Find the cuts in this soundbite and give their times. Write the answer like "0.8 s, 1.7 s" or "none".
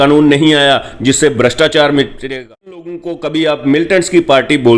3.0 s